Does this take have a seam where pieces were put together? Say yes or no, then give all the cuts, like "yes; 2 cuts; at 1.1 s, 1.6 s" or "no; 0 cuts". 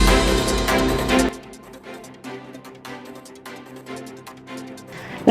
yes; 3 cuts; at 1.3 s, 3.5 s, 4.4 s